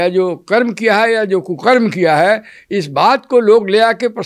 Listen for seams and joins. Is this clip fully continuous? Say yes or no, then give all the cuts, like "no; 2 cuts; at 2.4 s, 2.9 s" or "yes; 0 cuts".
yes; 0 cuts